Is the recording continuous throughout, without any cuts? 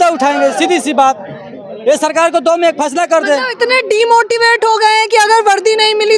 yes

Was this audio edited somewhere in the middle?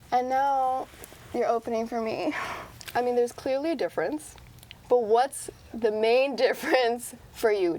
no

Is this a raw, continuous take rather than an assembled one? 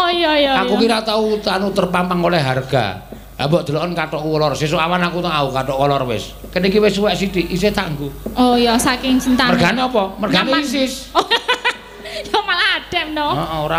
yes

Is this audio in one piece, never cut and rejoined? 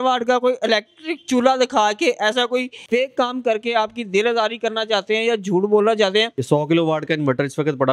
no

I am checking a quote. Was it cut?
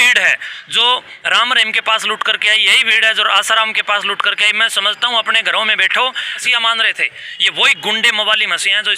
yes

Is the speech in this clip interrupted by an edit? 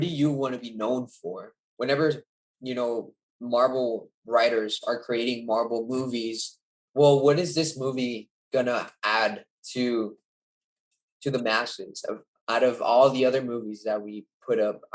yes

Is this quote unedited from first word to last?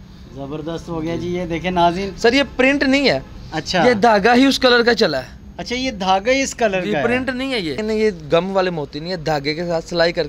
no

